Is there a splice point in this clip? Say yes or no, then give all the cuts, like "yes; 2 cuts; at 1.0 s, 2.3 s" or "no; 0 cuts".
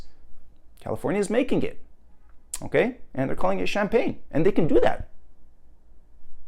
no; 0 cuts